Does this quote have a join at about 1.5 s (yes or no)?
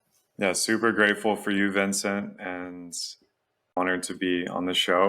no